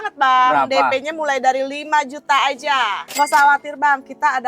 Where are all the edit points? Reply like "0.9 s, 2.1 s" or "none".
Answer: 3.1 s